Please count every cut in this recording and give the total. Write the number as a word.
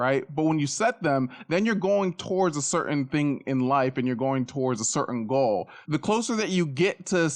one